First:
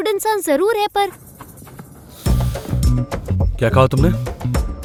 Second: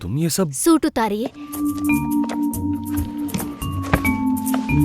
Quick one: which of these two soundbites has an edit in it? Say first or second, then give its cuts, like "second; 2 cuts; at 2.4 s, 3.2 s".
second; 1 cut; at 1.5 s